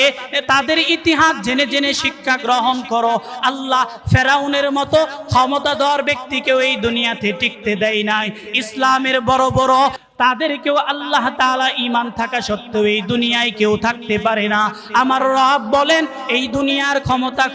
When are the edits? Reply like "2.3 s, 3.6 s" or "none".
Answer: 10.0 s